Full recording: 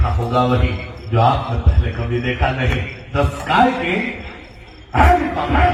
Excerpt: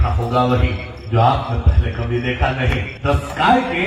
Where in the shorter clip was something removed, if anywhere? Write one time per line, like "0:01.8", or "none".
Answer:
0:02.9

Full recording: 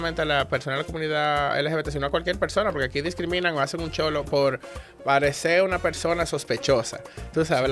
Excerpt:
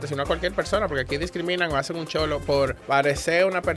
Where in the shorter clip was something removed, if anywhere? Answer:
0:02.8

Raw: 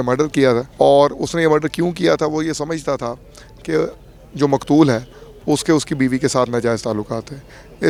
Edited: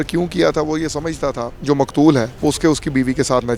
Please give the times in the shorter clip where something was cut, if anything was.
0:01.5
0:02.3

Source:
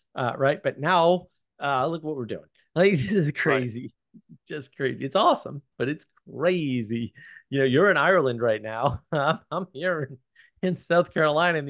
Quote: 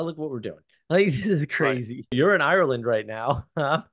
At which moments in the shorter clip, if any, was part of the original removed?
0:02.1

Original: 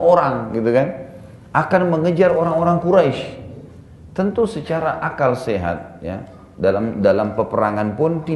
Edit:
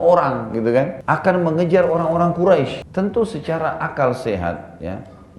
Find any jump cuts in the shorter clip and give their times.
0:01.0
0:02.8

